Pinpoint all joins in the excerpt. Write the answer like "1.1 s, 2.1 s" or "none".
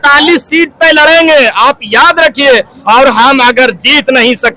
none